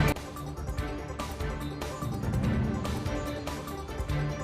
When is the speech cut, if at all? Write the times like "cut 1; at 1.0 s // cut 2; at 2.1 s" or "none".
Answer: cut 1; at 1.2 s

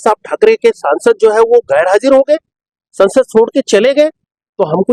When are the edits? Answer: none

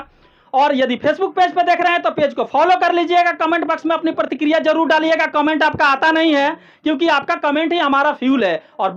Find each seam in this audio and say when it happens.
none

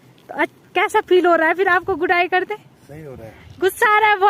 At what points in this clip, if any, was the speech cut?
none

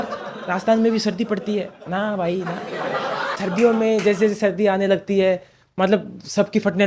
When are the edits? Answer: cut 1; at 3.4 s

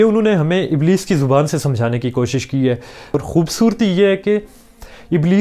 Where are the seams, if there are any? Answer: cut 1; at 3.1 s

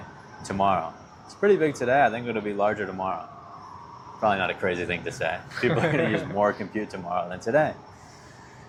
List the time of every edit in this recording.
none

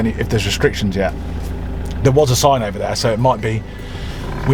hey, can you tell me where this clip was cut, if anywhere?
none

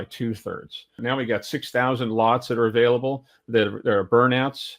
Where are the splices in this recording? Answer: cut 1; at 1.0 s

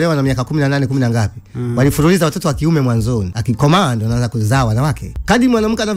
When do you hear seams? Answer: cut 1; at 3.3 s // cut 2; at 5.1 s

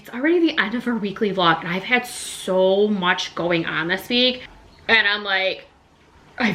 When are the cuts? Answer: cut 1; at 4.5 s

